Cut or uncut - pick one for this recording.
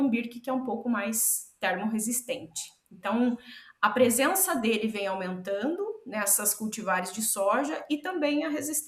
uncut